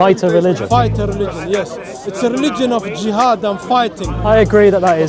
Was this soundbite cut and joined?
no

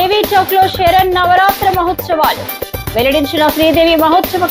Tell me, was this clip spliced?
no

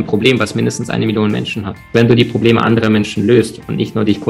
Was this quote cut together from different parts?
yes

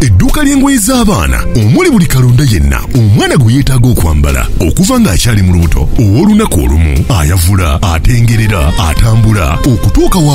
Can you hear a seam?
no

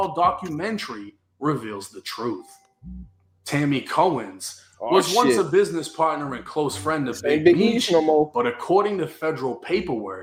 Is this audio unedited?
yes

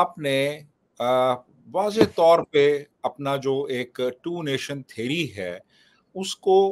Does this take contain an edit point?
no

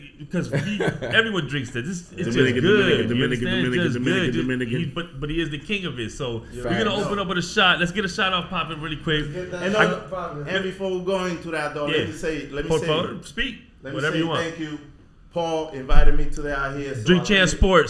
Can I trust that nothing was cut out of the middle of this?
yes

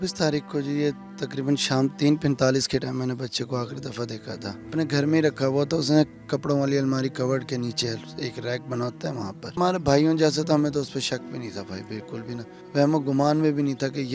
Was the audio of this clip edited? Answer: yes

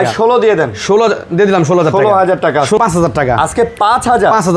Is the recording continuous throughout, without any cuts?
no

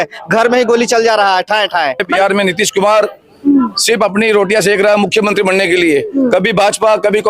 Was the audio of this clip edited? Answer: yes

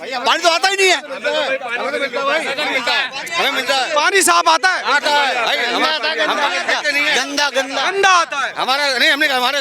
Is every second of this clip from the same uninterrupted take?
yes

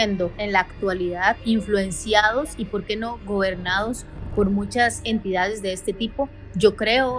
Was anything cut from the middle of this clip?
yes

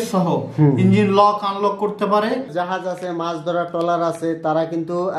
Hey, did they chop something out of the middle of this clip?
yes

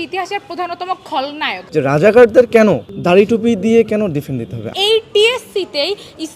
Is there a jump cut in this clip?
yes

